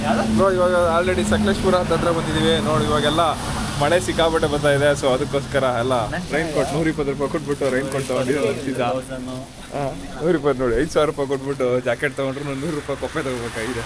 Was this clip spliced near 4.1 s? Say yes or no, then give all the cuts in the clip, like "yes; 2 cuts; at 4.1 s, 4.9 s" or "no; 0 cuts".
no; 0 cuts